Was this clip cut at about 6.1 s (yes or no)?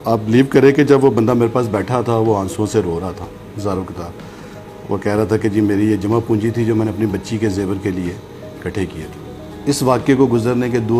no